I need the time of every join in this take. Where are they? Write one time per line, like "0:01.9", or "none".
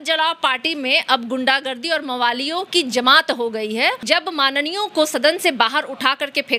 0:04.0